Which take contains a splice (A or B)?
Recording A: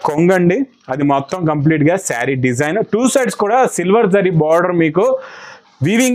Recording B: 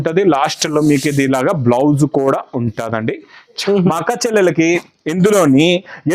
B